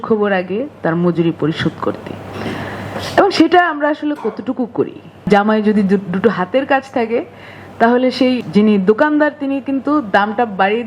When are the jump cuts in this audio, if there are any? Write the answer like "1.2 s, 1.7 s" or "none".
5.3 s, 8.4 s